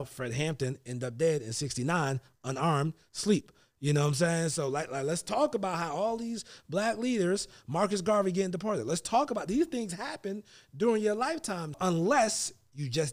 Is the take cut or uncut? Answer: cut